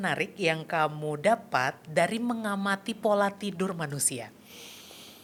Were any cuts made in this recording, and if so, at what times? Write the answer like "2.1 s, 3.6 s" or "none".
none